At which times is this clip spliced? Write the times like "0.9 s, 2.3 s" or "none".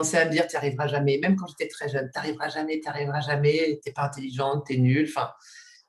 none